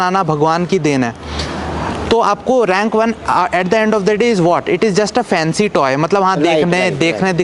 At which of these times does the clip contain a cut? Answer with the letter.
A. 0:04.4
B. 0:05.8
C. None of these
C